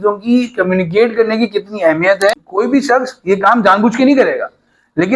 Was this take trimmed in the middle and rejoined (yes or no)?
yes